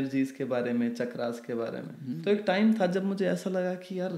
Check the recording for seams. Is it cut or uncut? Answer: cut